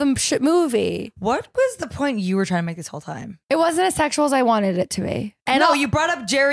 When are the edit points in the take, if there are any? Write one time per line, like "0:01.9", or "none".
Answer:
0:03.4
0:05.4

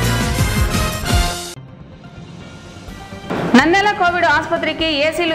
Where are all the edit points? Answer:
0:03.1

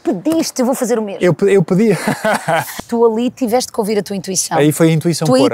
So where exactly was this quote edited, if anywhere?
0:02.8

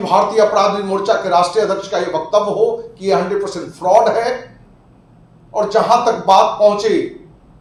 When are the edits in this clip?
none

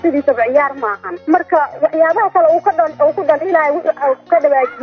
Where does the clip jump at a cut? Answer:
none

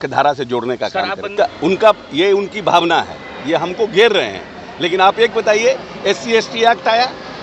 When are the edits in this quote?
0:01.3

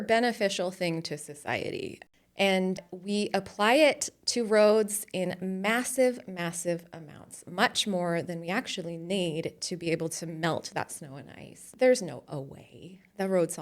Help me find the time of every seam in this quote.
0:02.0
0:11.7

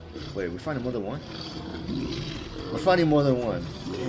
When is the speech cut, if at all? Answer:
none

